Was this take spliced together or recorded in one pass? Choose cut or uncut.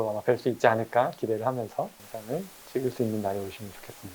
cut